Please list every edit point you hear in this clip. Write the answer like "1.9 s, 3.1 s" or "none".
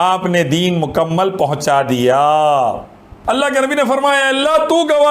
3.1 s